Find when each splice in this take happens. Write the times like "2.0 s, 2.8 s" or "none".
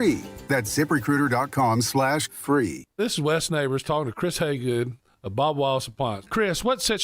2.8 s